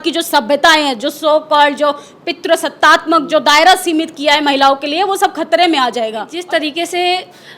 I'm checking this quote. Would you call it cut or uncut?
cut